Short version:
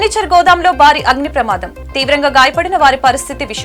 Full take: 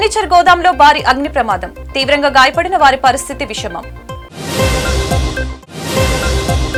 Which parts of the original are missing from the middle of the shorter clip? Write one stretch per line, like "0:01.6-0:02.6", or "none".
none